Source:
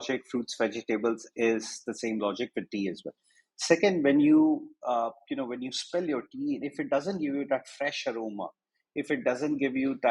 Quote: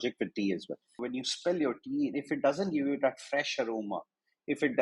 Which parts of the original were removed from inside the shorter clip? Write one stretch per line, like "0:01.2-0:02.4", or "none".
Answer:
0:03.4-0:05.5